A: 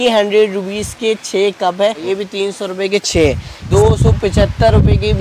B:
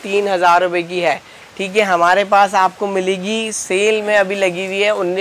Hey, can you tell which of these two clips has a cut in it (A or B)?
A